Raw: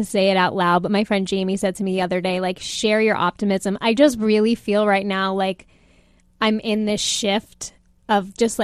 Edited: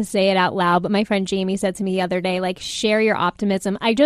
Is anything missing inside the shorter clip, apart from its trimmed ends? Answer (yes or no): no